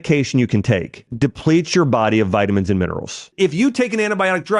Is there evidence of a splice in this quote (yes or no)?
yes